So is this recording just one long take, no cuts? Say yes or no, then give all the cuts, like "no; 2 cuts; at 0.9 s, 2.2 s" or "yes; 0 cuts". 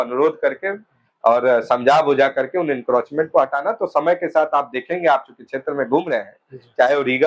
yes; 0 cuts